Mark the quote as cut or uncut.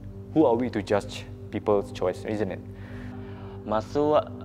cut